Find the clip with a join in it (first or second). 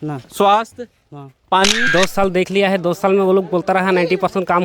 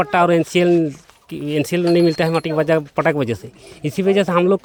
first